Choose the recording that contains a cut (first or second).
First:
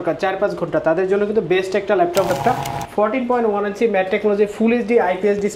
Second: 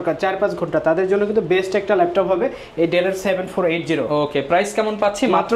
first